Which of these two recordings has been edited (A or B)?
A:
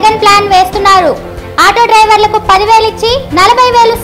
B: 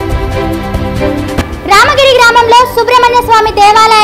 B